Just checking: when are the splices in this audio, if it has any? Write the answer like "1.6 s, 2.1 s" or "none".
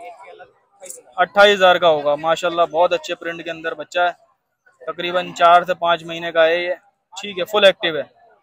none